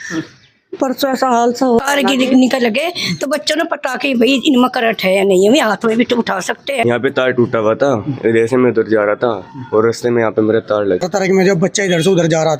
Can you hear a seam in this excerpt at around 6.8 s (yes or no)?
yes